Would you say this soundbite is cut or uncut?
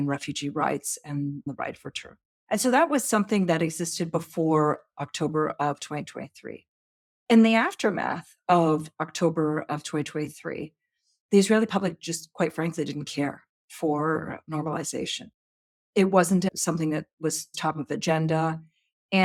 uncut